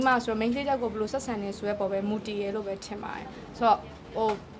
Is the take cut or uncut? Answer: uncut